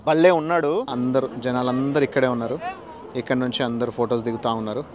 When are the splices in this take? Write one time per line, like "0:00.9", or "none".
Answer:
0:00.9